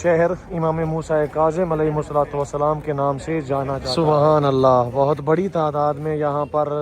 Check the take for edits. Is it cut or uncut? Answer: cut